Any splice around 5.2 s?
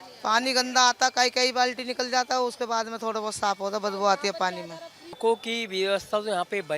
yes; 1 cut; at 5.2 s

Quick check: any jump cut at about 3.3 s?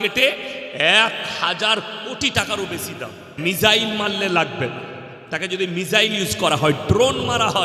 yes; 1 cut; at 3.3 s

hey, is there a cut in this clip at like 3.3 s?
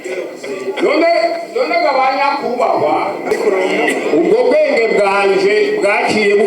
yes; 1 cut; at 3.3 s

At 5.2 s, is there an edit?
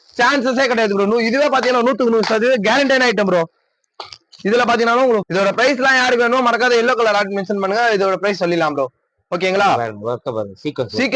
yes; 1 cut; at 5.2 s

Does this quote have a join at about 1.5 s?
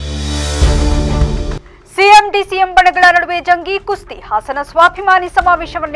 yes; 1 cut; at 1.5 s

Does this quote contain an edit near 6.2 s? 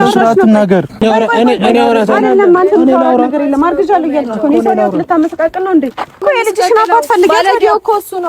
yes; 2 cuts; at 0.9 s, 6.2 s

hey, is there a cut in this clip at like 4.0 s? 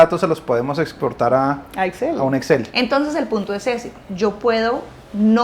no; 2 cuts; at 1.6 s, 2.7 s

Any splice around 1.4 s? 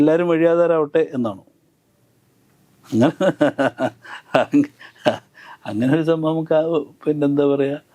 no; 0 cuts

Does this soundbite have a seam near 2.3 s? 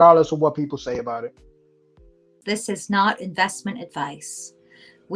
yes; 1 cut; at 2.3 s

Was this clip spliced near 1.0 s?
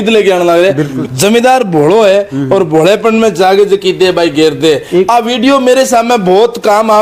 yes; 1 cut; at 1.0 s

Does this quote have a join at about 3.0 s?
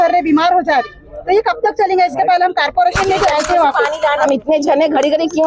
no; 1 cut; at 4.3 s

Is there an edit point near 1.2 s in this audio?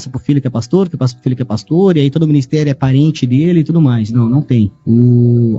no; 1 cut; at 4.4 s

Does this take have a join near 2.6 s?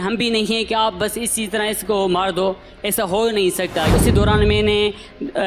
no; 1 cut; at 3.9 s

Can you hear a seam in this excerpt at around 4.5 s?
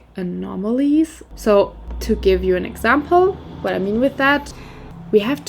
yes; 2 cuts; at 1.2 s, 4.5 s

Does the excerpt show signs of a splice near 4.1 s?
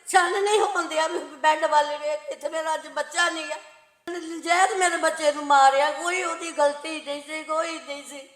yes; 1 cut; at 4.1 s

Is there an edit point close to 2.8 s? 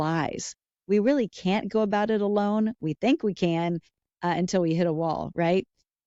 no; 0 cuts

